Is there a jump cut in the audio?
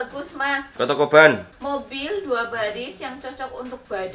yes; 1 cut; at 1.5 s

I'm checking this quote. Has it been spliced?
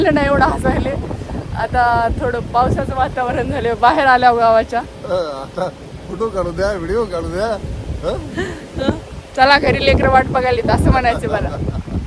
no; 0 cuts

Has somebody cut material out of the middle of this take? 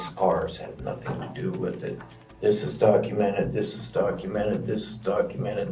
no; 0 cuts

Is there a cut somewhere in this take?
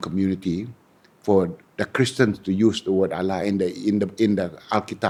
no; 0 cuts

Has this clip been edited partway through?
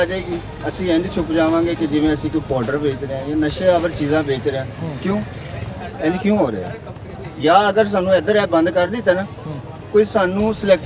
no; 0 cuts

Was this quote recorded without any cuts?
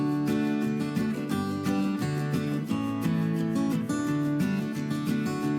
yes; 0 cuts

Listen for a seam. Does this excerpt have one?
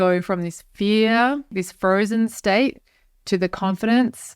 yes; 1 cut; at 1.5 s

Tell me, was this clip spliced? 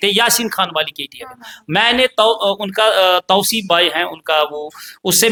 no; 0 cuts

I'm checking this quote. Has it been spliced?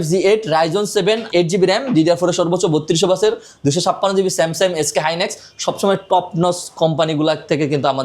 yes; 1 cut; at 1.2 s

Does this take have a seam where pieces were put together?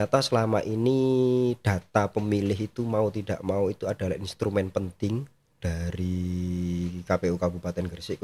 no; 0 cuts

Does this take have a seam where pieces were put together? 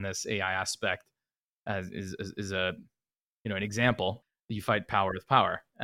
yes; 1 cut; at 4.2 s

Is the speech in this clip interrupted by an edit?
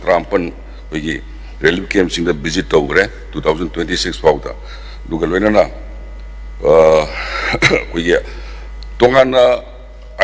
no; 0 cuts

